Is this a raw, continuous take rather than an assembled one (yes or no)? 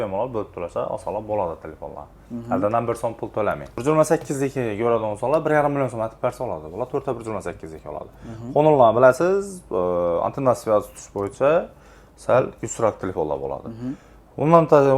no